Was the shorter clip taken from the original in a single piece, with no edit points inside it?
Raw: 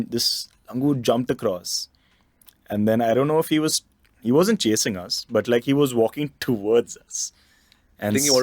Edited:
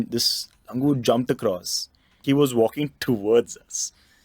no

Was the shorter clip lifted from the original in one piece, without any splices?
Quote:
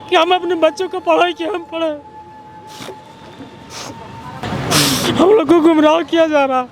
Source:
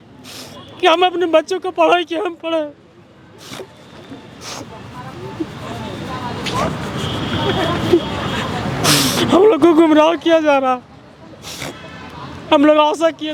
no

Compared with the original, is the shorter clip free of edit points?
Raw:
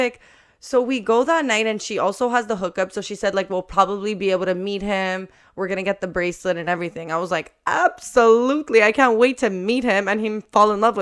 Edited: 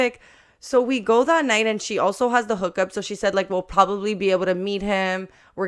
yes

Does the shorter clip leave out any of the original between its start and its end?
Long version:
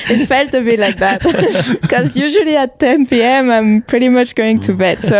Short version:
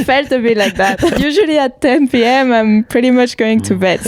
yes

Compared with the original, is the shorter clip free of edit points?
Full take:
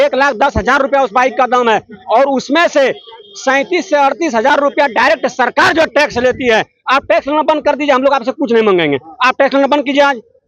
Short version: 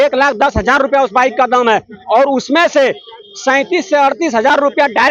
yes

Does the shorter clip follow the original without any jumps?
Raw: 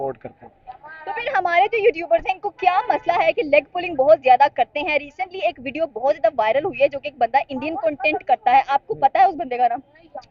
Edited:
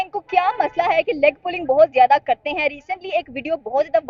yes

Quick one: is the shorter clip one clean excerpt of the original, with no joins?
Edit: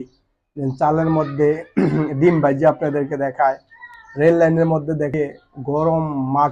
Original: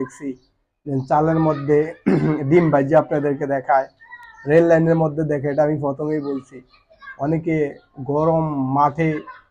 no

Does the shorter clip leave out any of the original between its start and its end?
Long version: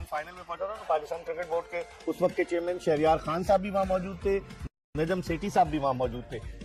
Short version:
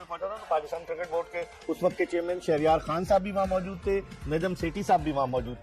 yes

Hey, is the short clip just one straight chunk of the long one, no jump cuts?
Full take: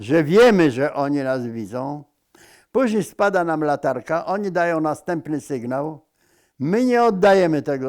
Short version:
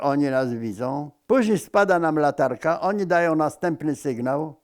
no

